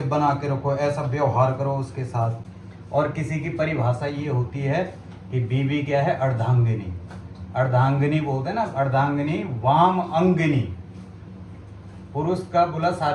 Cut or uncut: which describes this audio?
uncut